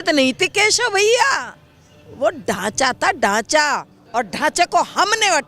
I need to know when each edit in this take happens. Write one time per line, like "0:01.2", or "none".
0:03.9